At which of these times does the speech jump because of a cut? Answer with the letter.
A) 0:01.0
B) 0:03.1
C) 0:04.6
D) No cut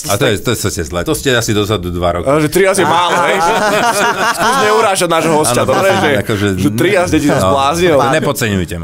A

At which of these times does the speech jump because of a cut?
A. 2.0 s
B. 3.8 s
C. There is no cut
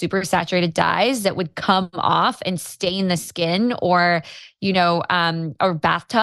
C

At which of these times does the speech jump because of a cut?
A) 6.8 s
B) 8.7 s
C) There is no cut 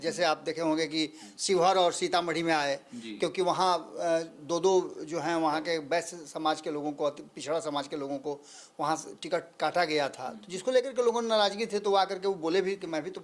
C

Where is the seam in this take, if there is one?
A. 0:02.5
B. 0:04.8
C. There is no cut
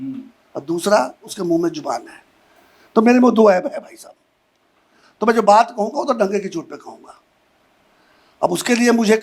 C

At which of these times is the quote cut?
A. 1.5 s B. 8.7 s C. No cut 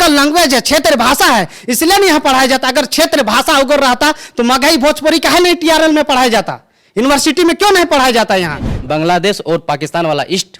B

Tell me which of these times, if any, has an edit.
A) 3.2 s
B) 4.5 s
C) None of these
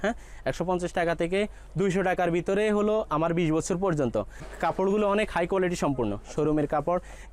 B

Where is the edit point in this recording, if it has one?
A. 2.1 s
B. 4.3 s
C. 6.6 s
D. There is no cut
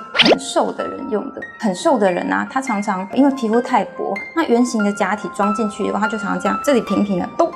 C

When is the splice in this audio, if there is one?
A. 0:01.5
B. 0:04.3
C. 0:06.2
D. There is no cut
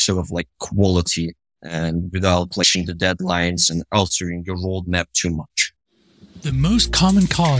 C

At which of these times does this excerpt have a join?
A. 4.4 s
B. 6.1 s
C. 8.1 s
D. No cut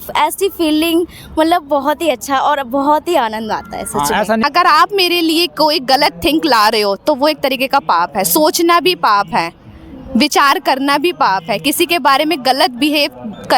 A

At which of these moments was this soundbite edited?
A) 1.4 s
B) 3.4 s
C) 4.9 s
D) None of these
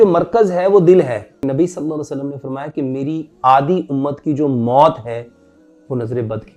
A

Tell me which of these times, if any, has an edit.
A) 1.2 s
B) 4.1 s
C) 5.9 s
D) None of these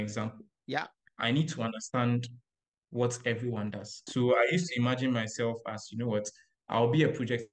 B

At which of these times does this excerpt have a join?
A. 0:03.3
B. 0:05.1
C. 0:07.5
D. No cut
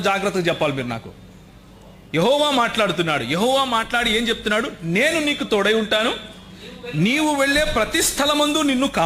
D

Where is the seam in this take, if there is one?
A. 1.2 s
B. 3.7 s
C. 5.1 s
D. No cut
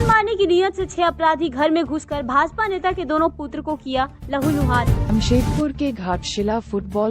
C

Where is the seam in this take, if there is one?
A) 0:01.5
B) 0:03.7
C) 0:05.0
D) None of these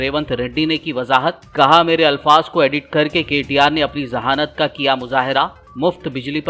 D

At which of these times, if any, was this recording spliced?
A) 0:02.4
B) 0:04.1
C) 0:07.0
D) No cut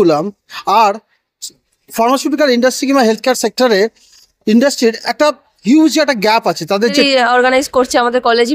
C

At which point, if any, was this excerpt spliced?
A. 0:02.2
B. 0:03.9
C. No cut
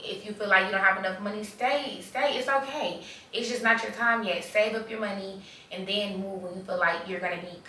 C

